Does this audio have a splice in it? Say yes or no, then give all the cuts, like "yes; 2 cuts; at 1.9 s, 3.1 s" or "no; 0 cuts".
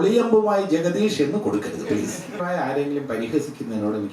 yes; 1 cut; at 2.4 s